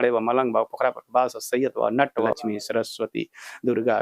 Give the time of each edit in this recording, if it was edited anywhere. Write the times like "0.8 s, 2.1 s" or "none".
2.3 s